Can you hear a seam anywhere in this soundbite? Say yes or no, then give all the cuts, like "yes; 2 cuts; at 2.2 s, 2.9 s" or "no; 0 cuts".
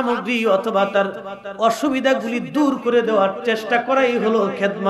no; 0 cuts